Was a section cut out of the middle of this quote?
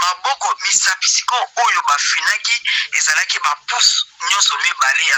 no; 0 cuts

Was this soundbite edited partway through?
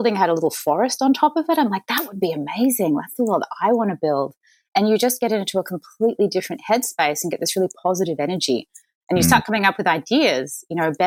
no; 0 cuts

